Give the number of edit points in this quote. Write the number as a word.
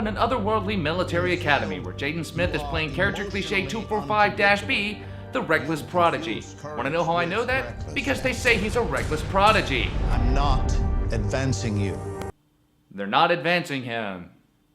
one